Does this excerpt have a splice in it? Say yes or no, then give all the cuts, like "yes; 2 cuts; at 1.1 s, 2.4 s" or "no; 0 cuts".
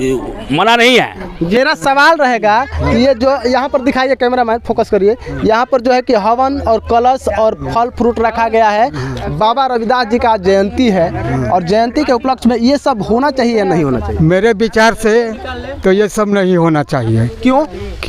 yes; 1 cut; at 1.6 s